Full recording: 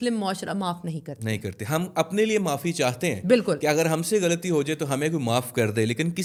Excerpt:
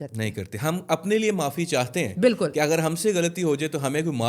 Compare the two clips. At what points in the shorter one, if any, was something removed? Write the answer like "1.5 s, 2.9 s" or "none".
none